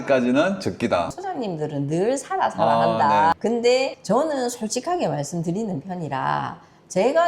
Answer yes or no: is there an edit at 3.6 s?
no